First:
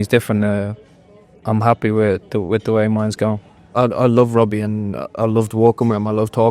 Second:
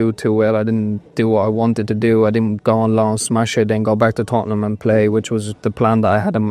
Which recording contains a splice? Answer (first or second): first